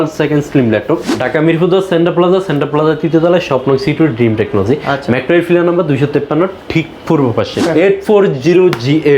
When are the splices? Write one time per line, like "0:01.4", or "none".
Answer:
0:01.1
0:07.6